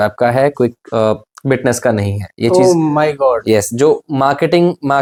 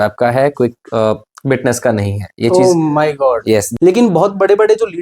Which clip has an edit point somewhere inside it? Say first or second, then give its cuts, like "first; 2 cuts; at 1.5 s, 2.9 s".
second; 1 cut; at 3.7 s